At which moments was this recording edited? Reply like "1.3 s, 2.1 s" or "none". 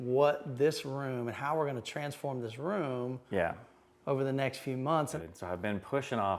5.1 s